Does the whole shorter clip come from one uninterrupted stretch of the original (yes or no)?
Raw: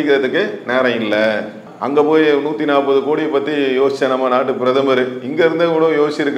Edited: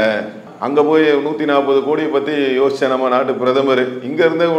yes